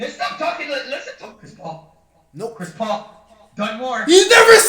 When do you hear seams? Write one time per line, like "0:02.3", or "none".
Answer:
0:01.1